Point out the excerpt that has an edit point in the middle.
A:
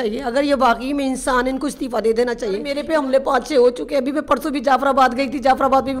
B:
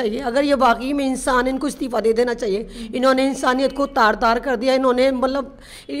A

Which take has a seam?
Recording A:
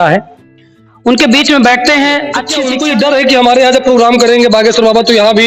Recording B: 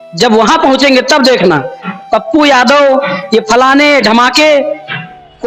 A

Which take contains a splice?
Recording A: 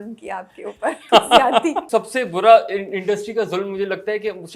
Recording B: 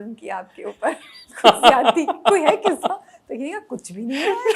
A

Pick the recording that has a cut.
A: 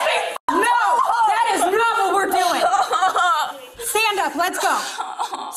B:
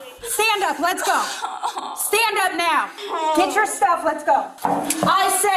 B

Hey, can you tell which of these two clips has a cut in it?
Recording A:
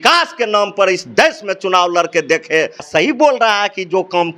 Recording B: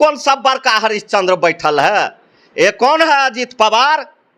A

